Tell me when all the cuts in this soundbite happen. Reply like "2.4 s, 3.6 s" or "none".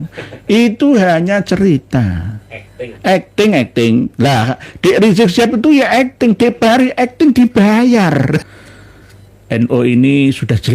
8.4 s